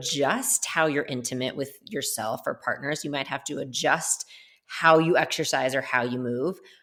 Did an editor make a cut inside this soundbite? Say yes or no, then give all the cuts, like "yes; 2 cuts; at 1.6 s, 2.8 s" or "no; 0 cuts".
no; 0 cuts